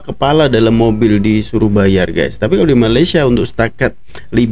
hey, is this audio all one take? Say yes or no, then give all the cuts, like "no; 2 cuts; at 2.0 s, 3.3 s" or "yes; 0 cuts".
yes; 0 cuts